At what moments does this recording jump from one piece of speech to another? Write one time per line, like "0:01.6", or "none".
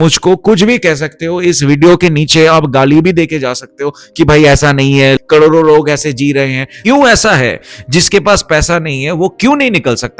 0:06.7